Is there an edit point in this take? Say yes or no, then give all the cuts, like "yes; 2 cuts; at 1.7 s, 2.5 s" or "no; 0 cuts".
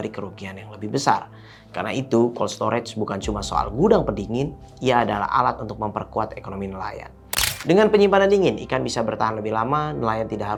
no; 0 cuts